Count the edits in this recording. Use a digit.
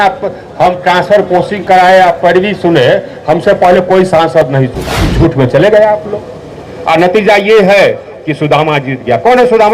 1